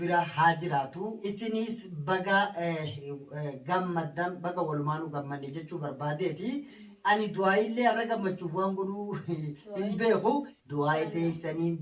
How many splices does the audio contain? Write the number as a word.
two